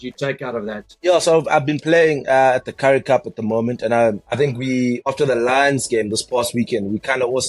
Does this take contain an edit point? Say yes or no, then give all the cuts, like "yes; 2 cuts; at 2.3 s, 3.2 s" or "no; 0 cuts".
no; 0 cuts